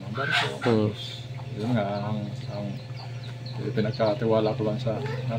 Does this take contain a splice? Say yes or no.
no